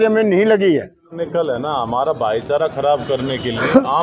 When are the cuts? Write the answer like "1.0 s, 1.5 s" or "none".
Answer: 1.1 s